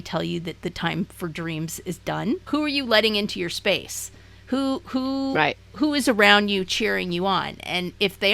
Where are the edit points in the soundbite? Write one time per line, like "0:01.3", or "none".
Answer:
0:02.4